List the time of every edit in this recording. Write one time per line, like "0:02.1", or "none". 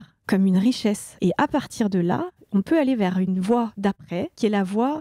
0:01.1
0:02.4